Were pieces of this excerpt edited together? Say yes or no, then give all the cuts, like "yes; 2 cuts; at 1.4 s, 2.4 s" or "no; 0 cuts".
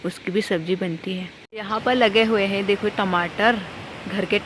yes; 1 cut; at 1.6 s